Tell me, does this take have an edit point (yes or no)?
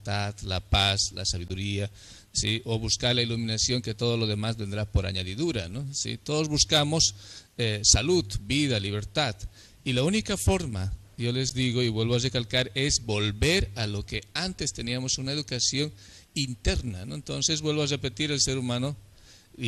no